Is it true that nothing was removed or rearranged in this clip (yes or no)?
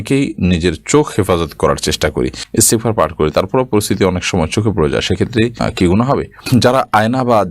no